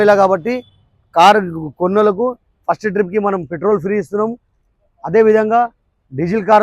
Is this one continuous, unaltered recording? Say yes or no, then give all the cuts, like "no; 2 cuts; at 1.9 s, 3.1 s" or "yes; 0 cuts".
yes; 0 cuts